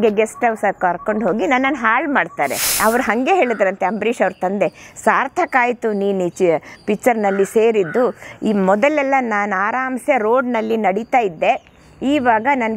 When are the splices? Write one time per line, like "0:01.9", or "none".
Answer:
0:02.7